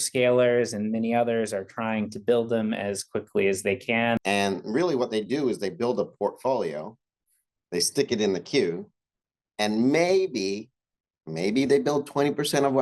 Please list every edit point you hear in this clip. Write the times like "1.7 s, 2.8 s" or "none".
4.2 s